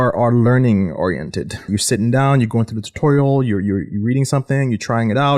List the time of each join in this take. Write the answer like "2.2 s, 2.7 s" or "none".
1.7 s